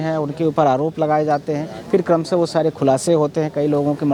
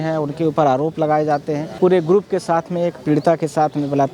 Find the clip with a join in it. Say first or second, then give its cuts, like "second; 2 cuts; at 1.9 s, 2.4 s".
second; 1 cut; at 1.7 s